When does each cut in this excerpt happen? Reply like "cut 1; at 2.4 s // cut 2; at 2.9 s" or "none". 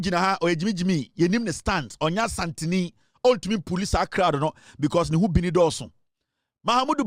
none